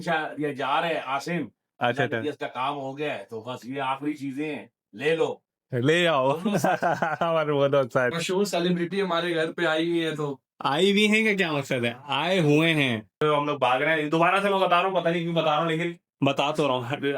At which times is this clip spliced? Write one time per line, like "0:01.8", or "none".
0:08.2
0:13.2